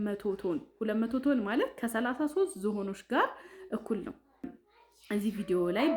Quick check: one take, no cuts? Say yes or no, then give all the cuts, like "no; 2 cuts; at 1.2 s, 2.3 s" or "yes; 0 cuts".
no; 1 cut; at 4.5 s